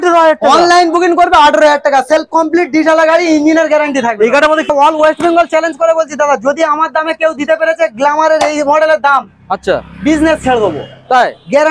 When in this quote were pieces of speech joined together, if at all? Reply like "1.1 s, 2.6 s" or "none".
4.7 s